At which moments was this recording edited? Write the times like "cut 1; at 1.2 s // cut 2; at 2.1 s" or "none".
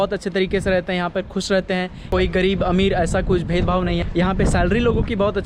cut 1; at 2.0 s